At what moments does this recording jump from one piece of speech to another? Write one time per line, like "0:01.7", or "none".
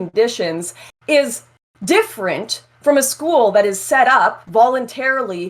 0:04.4

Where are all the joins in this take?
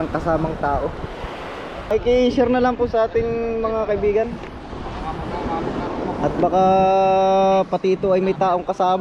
0:01.9

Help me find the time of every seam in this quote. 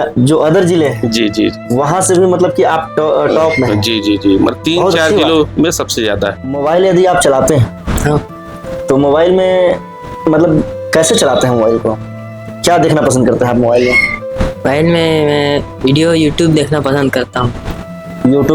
0:06.6

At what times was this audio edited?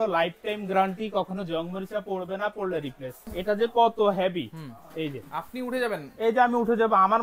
0:03.1

